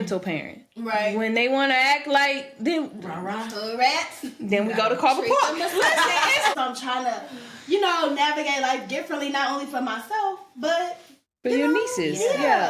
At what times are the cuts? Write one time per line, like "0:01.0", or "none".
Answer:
0:06.5

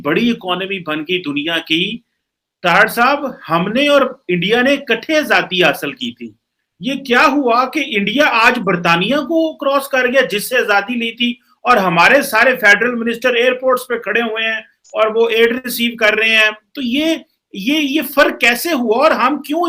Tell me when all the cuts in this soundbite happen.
none

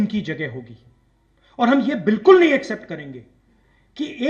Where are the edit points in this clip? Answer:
none

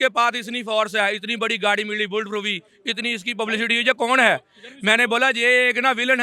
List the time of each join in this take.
none

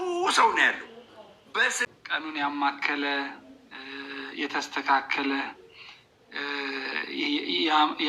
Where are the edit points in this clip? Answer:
0:01.5

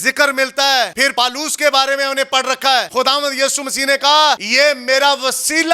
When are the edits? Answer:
0:01.0
0:02.9
0:04.5

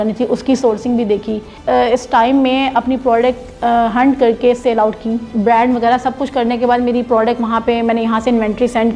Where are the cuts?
0:01.5
0:05.3

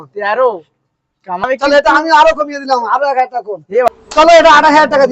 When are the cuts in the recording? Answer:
0:01.4
0:03.9

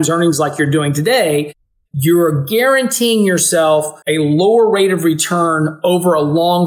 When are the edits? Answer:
0:04.0

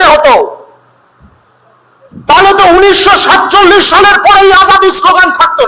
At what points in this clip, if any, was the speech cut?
none

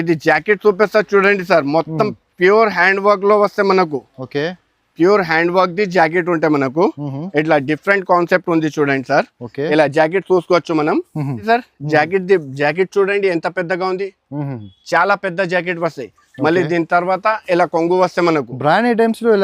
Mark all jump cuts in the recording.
0:11.4

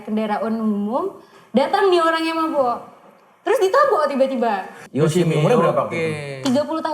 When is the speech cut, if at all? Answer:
0:04.8

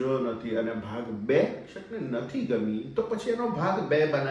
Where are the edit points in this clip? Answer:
0:01.7

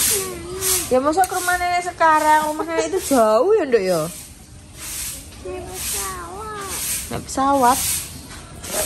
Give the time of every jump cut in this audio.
none

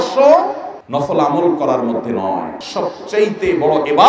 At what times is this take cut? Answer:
0:02.6

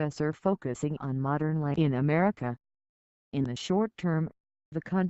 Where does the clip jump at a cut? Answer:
0:01.2

